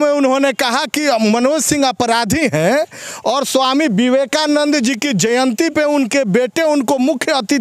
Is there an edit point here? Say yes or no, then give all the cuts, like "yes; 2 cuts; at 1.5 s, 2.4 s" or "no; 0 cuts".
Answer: no; 0 cuts